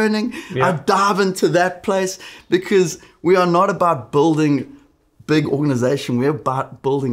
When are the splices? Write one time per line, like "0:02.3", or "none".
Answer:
0:02.3

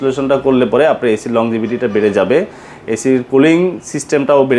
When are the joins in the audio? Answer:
none

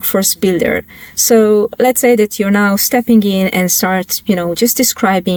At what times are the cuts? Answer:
none

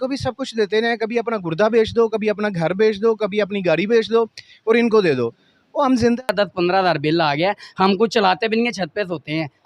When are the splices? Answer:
0:06.2

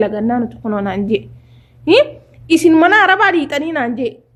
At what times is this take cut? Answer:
none

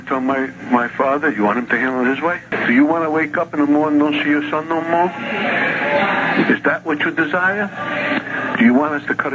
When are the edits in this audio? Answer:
0:02.5

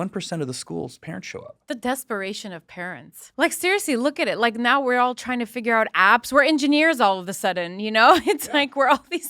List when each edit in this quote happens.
0:01.5
0:03.2

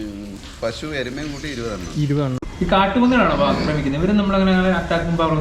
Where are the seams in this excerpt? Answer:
0:02.4

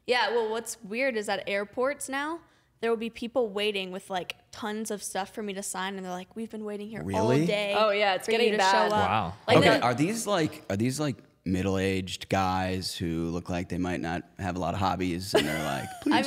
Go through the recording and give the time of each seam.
none

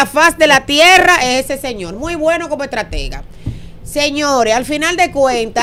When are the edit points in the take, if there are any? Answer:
none

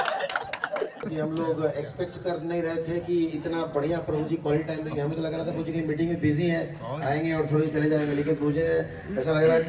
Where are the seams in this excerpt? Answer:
0:01.1

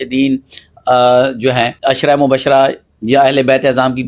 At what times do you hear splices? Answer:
0:01.8

